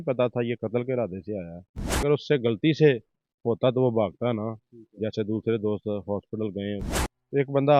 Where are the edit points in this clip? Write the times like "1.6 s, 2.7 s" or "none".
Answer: 2.0 s, 6.9 s